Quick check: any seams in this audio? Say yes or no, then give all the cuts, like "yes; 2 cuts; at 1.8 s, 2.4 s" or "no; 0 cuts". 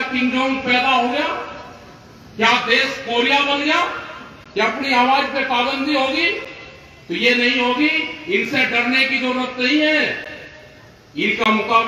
no; 0 cuts